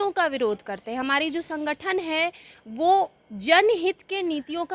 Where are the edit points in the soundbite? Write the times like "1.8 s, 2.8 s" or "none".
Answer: none